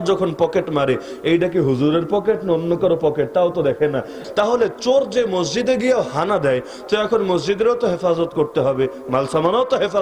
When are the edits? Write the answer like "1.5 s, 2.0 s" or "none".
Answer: 4.2 s